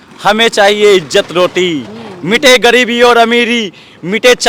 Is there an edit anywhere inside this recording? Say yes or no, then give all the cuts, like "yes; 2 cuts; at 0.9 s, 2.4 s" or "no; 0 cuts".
no; 0 cuts